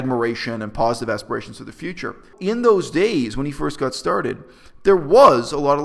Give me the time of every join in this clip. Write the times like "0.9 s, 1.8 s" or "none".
2.3 s